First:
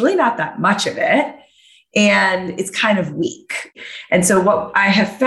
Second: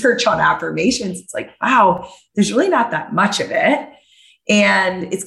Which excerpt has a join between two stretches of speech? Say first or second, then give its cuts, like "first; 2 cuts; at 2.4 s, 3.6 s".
first; 1 cut; at 3.7 s